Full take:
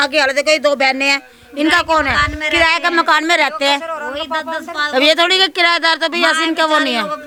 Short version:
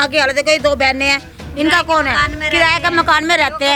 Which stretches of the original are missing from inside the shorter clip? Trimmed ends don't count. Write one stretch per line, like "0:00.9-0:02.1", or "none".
none